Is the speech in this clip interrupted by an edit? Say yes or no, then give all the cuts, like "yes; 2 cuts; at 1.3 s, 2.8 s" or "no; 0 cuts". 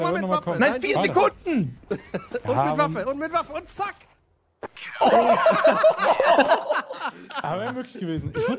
no; 0 cuts